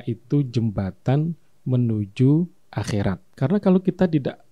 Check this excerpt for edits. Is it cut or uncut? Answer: cut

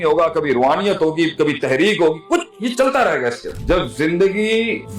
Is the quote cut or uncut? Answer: cut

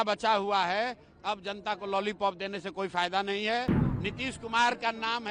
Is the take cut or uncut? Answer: cut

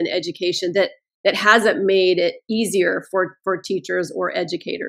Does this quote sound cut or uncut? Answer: uncut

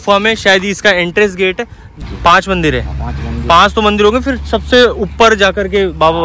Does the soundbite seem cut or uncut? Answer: cut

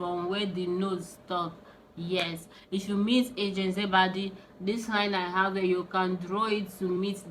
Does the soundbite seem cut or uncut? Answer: uncut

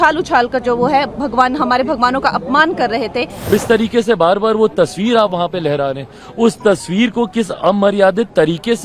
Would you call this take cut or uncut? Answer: cut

